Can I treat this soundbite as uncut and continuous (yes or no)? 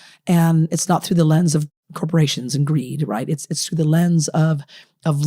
no